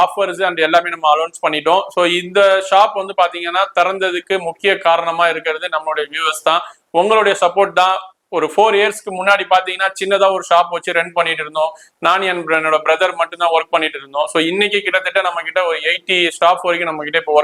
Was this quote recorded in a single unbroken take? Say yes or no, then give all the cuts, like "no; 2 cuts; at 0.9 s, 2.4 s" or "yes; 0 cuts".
yes; 0 cuts